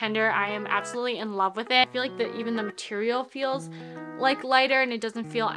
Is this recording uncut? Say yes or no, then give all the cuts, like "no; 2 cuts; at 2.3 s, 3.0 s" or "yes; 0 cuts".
no; 1 cut; at 1.9 s